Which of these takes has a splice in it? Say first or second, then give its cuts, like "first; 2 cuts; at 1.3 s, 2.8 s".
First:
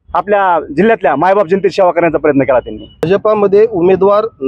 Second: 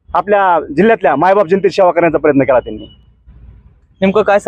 first; 1 cut; at 3.0 s